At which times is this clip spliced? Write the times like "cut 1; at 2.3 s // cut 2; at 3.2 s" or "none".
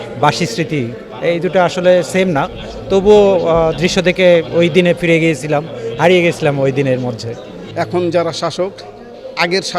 cut 1; at 7.6 s